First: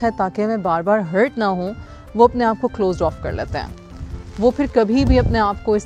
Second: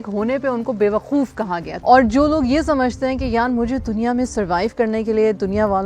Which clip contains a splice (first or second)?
second